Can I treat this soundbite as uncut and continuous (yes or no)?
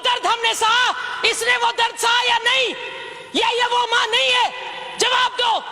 yes